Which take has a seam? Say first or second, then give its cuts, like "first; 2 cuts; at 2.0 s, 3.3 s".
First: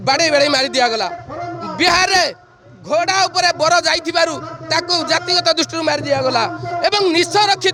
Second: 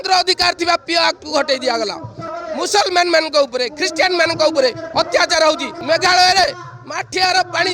second; 2 cuts; at 2.2 s, 5.7 s